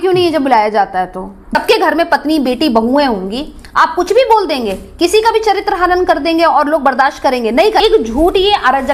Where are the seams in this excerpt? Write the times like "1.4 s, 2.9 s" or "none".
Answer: 1.4 s, 7.8 s